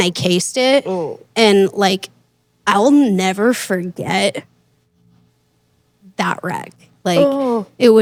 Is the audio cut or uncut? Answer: uncut